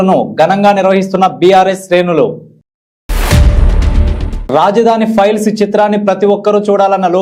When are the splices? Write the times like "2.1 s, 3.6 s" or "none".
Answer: none